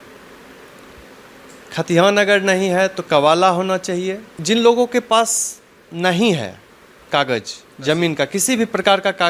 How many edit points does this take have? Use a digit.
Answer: 1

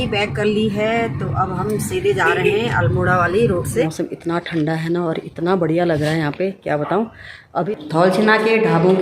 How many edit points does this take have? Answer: 2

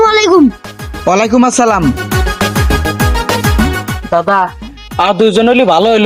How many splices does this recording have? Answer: 0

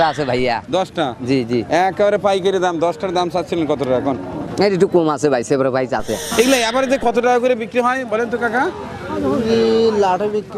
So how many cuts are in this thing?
2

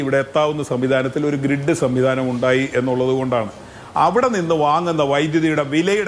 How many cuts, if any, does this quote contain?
0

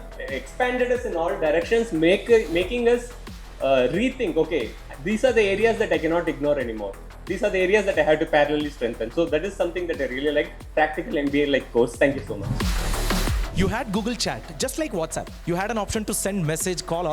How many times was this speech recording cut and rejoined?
1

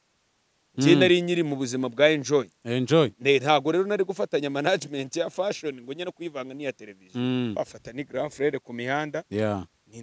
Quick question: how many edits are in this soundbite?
1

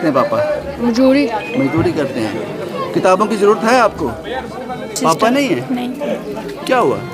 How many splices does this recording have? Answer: 1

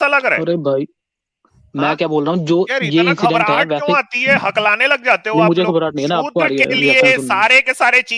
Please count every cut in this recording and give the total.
0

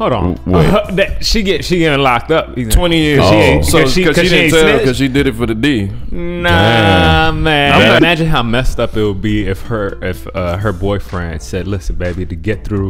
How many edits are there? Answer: 1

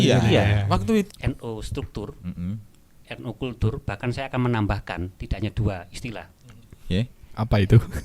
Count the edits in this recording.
1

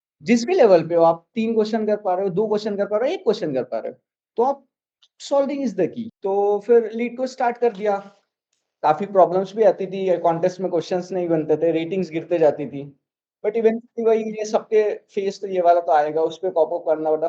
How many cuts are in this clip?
1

